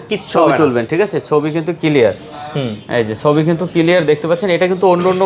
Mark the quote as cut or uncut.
uncut